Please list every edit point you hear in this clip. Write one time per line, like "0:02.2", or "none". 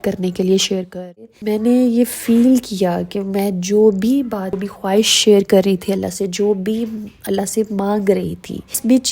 0:01.3